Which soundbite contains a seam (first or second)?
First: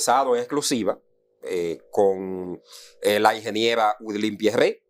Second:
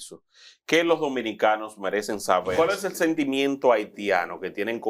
second